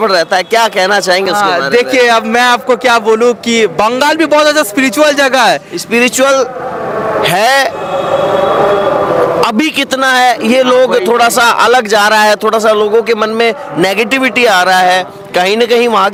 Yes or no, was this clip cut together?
no